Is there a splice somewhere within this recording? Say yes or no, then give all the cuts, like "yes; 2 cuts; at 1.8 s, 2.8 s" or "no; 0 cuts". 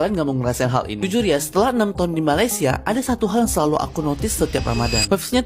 no; 0 cuts